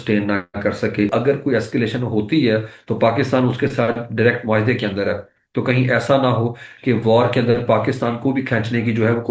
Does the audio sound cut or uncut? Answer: cut